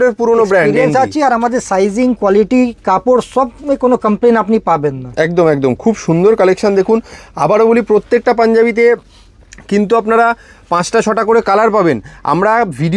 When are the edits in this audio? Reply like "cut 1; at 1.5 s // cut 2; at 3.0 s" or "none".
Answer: none